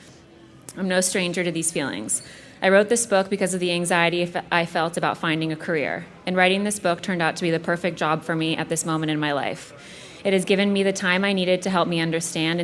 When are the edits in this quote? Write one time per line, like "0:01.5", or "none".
none